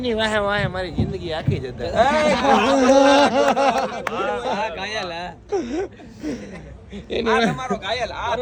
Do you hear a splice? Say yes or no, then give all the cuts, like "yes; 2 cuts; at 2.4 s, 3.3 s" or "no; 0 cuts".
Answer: no; 0 cuts